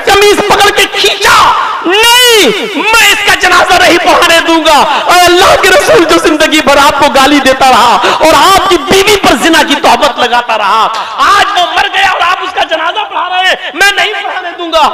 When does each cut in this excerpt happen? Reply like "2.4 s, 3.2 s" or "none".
none